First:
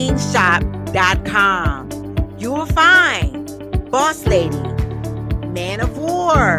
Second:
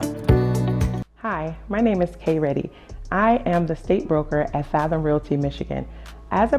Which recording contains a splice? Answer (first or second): second